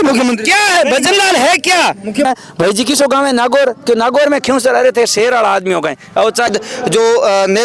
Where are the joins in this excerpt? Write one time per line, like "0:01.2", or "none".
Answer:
0:02.2
0:06.5